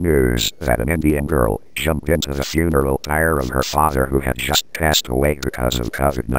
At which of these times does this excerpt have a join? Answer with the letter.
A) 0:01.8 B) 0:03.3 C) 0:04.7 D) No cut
D